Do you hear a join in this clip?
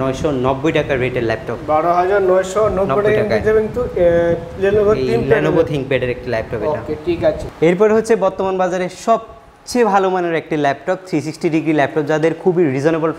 no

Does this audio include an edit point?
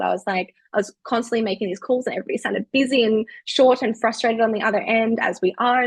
no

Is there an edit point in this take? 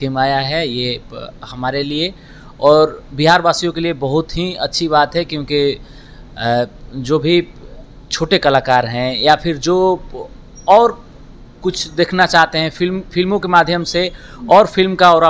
no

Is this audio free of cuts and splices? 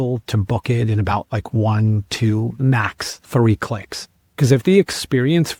yes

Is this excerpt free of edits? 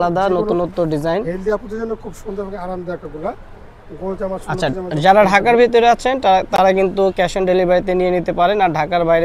yes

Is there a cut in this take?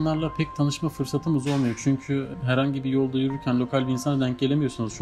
yes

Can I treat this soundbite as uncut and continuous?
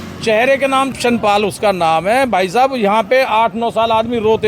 no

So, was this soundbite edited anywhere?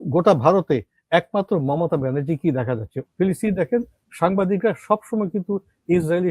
yes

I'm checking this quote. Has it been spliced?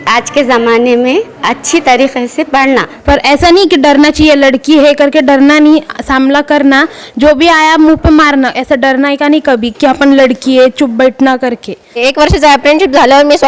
yes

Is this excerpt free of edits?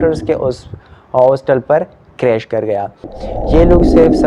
no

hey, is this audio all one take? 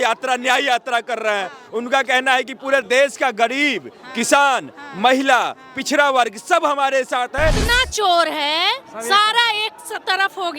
no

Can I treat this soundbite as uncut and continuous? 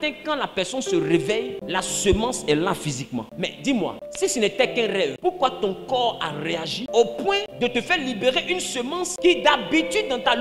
no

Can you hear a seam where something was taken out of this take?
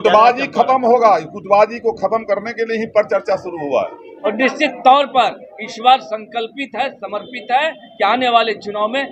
yes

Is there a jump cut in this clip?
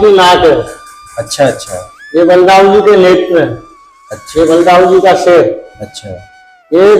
no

